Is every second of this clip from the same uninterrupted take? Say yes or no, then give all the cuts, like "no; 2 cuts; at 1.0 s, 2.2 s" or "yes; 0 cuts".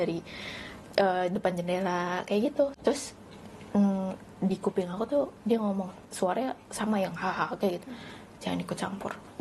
no; 1 cut; at 2.7 s